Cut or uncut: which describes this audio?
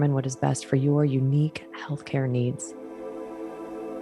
cut